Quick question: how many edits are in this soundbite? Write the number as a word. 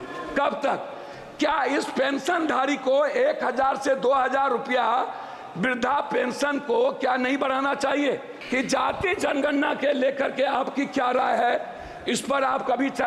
one